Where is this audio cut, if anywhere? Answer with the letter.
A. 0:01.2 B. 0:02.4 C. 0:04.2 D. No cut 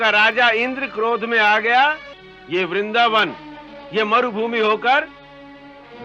B